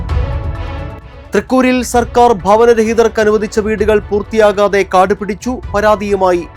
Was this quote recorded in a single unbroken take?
no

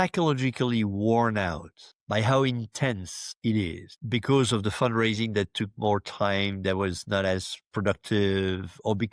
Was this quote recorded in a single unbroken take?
yes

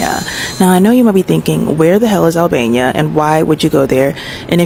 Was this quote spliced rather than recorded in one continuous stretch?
no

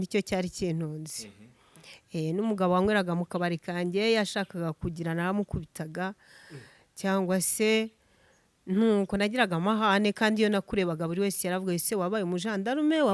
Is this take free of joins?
yes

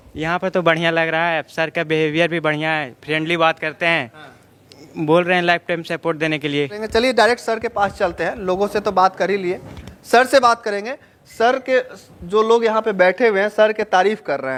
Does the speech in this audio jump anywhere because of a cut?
no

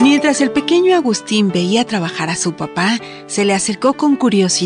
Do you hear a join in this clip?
no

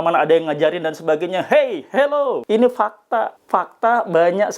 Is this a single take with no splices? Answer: no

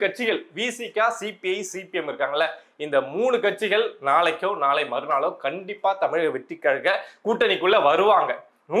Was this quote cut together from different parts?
no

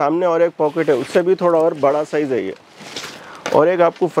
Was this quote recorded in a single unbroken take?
yes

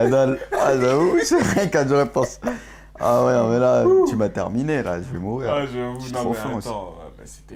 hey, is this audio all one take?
yes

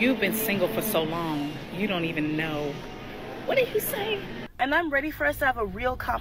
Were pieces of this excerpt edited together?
yes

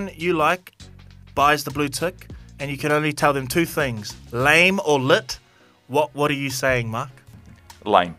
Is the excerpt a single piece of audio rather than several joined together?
yes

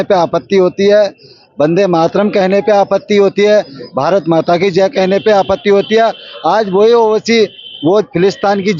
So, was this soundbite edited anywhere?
no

